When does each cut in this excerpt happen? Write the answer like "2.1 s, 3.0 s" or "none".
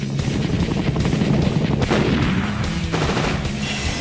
2.3 s